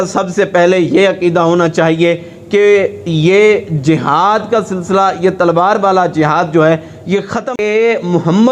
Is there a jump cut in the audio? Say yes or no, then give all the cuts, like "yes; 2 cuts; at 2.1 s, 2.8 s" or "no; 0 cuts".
yes; 1 cut; at 7.5 s